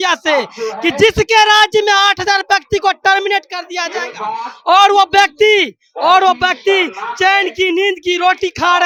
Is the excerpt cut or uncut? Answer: uncut